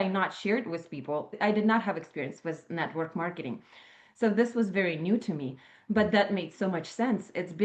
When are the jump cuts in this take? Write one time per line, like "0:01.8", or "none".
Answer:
0:01.3